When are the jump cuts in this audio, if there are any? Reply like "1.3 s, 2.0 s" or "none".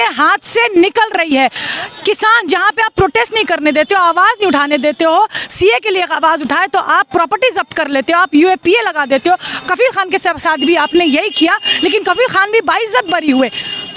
none